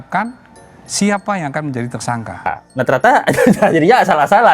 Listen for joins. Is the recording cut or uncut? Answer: cut